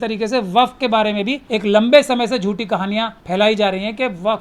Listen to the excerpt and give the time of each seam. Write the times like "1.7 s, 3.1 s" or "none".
1.4 s, 3.2 s

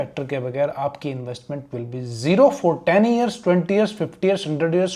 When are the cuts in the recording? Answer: none

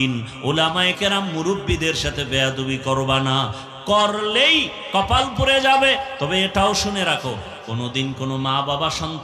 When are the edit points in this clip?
none

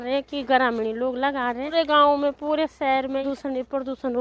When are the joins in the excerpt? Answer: 1.7 s, 3.3 s

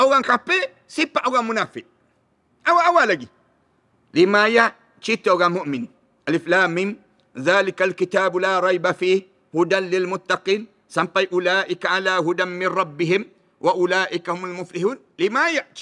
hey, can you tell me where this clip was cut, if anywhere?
none

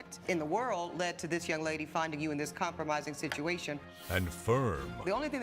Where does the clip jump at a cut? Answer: 3.9 s

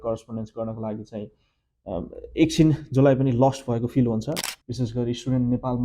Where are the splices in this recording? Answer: 4.4 s

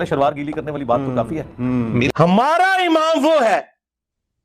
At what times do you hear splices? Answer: 2.1 s

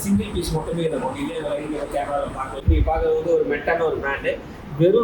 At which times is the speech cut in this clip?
2.6 s

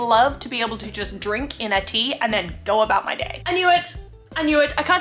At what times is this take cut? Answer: none

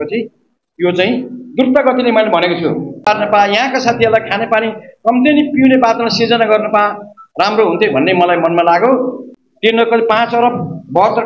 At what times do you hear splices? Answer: 3.1 s, 9.2 s

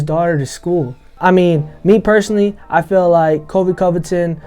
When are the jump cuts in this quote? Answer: 1.0 s

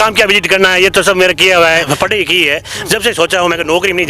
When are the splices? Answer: 1.9 s

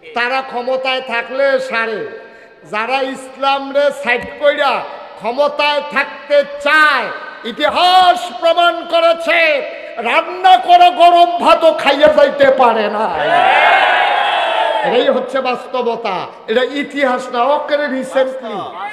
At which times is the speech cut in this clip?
none

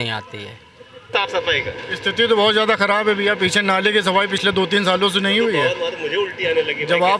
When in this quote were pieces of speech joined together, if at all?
1.1 s

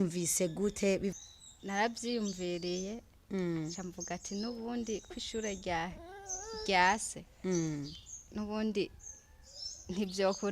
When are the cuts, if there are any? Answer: 1.1 s

